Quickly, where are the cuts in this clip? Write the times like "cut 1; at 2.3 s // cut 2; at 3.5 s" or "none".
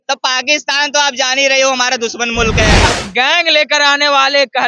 cut 1; at 2.9 s